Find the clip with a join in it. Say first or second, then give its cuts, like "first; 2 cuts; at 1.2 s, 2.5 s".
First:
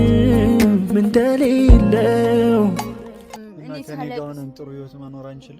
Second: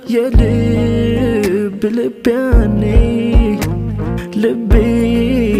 first; 1 cut; at 3.4 s